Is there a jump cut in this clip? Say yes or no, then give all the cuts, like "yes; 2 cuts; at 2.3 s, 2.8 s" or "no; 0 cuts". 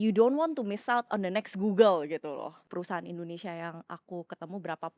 yes; 1 cut; at 2.6 s